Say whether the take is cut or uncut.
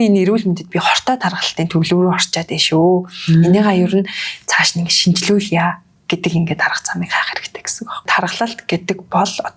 cut